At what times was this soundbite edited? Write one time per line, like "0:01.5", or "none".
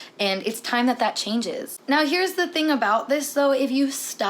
0:01.7